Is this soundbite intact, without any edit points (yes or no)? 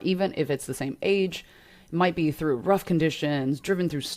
yes